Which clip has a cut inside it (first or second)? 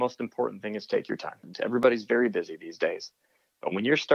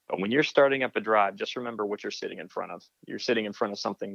first